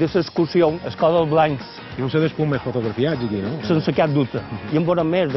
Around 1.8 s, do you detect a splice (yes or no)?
yes